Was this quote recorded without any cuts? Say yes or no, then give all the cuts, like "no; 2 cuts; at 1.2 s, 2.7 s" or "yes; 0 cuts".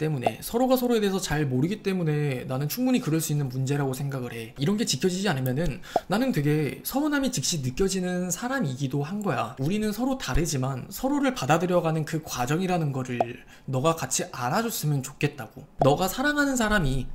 no; 3 cuts; at 4.5 s, 9.5 s, 15.6 s